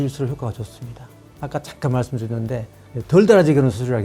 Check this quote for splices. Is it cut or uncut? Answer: uncut